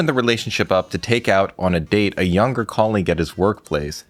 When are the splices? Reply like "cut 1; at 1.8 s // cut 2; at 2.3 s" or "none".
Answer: none